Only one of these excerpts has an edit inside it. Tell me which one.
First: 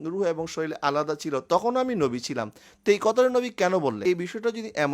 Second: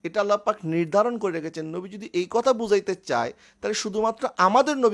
first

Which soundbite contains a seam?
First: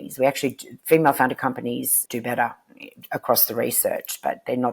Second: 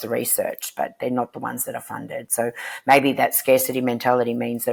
first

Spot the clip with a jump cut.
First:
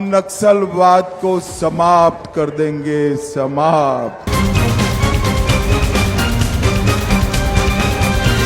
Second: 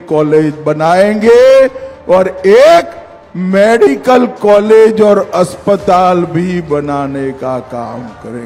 first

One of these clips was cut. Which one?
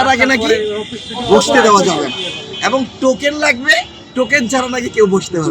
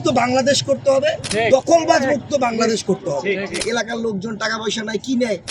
second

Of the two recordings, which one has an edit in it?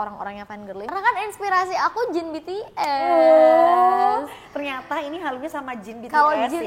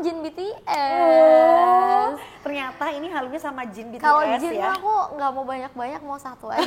first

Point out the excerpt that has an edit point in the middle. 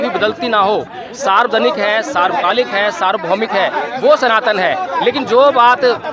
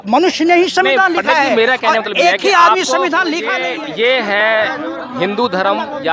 second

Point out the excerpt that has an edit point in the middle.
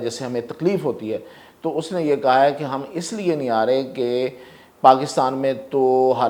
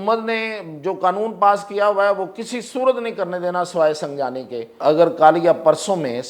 second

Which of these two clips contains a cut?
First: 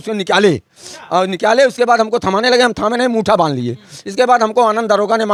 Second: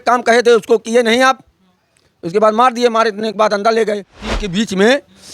second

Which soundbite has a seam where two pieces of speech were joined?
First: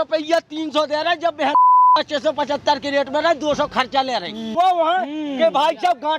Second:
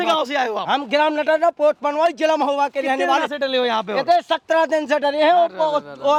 first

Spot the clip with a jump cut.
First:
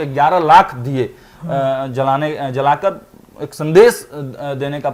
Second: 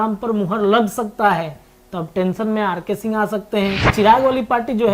second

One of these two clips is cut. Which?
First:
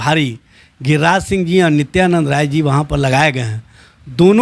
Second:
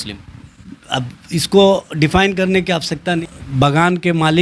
second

